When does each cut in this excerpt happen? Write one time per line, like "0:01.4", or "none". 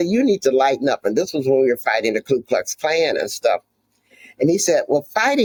none

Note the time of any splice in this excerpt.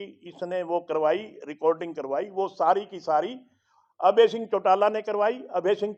none

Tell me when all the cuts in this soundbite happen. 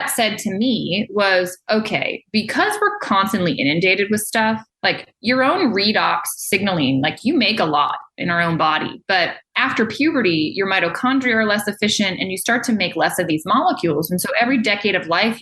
0:04.7
0:09.4

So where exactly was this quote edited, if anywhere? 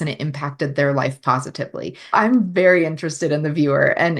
0:02.1

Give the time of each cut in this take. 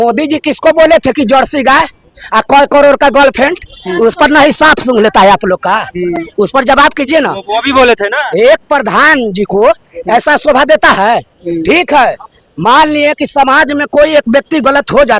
none

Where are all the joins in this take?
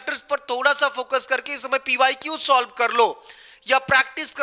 none

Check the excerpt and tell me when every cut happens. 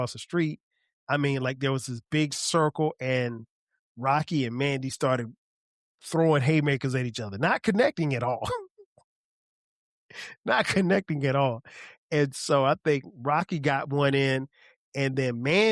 none

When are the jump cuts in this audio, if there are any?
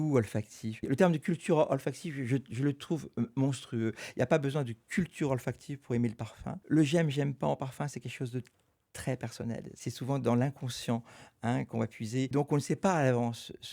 0:00.8
0:06.6
0:09.7
0:12.3

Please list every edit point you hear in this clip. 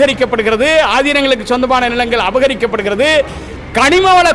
none

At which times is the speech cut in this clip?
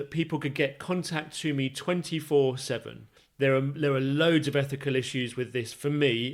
none

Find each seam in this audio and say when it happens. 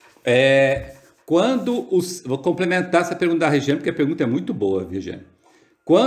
0:03.8

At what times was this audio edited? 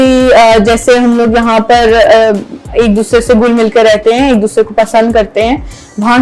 none

